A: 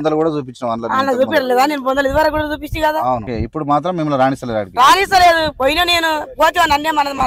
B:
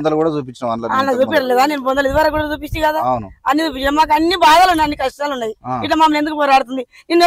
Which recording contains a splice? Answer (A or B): A